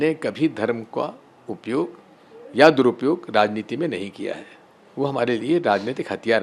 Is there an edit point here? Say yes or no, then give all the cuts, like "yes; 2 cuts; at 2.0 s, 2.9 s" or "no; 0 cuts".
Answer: no; 0 cuts